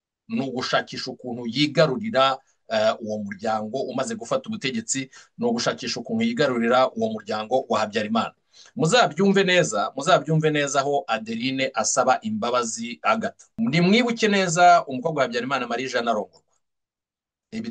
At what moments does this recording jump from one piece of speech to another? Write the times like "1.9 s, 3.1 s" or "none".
13.4 s